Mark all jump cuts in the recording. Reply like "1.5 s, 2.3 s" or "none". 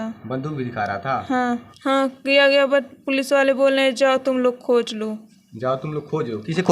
1.7 s